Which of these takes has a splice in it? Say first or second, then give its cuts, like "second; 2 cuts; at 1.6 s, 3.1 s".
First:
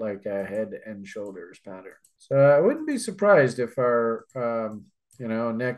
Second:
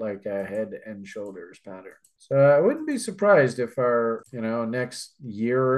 second; 1 cut; at 4.3 s